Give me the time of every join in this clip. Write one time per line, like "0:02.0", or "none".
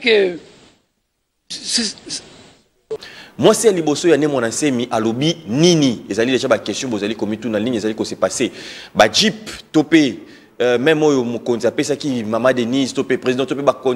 0:02.9